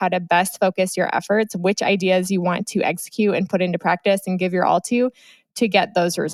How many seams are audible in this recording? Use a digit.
0